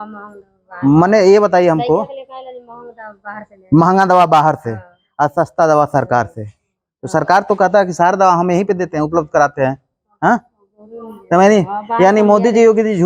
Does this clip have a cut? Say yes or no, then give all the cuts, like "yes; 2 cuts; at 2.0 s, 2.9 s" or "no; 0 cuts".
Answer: no; 0 cuts